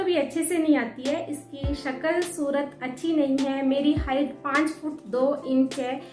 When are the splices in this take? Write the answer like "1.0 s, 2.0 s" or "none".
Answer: none